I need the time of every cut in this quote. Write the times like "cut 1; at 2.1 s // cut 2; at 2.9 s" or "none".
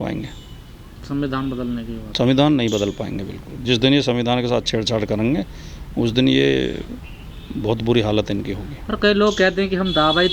none